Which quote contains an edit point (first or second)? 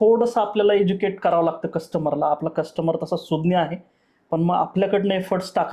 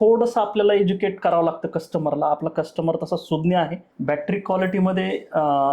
second